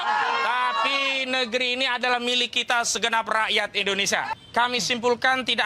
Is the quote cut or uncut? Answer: cut